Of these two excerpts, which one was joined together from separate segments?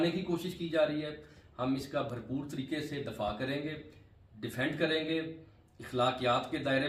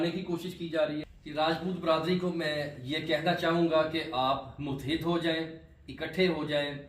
second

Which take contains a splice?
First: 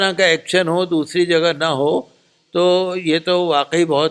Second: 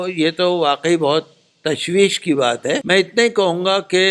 second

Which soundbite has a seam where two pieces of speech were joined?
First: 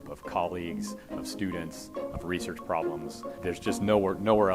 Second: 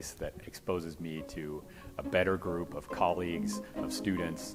first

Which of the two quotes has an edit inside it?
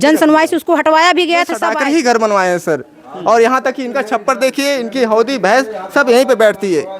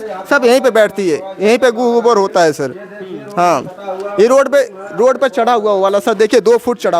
first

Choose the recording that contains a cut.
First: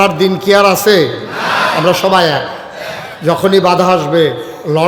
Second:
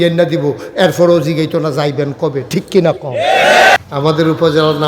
second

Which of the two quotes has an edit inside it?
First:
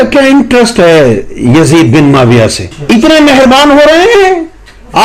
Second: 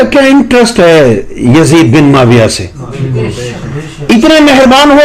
first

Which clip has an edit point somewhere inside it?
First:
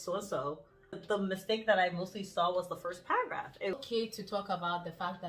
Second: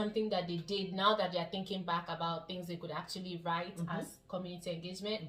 first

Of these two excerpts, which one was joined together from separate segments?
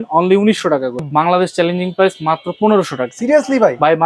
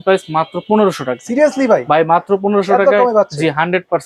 first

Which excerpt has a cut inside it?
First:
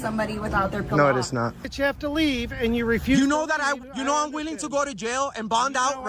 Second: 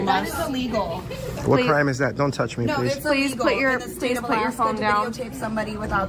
first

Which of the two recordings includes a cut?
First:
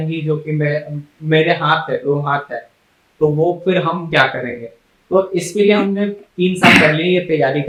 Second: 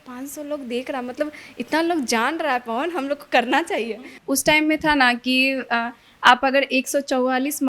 second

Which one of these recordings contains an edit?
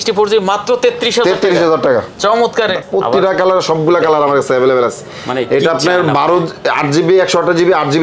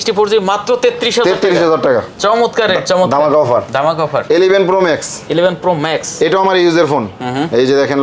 first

